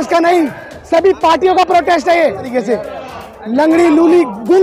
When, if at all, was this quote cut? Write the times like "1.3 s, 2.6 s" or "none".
2.5 s